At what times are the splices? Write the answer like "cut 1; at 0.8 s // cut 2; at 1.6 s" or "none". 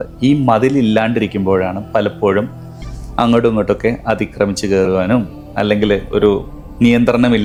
none